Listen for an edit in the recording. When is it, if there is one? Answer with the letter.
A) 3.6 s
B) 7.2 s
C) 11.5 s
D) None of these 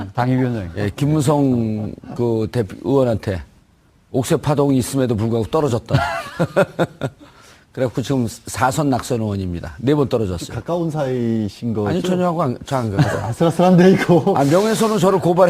B